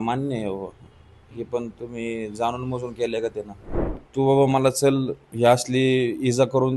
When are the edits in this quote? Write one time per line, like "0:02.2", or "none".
0:04.0